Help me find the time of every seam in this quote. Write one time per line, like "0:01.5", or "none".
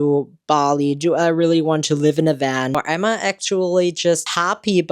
0:02.7